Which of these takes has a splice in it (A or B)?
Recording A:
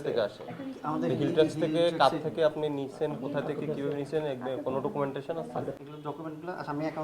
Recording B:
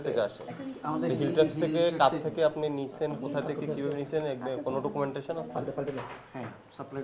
A